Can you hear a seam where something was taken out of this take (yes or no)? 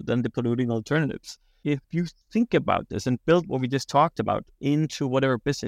yes